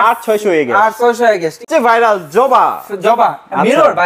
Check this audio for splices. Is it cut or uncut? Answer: cut